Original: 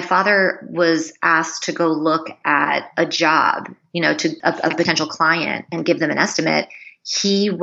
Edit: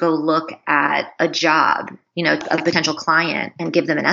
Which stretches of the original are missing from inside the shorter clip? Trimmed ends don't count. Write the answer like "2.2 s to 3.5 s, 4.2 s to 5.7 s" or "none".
4.2 s to 4.5 s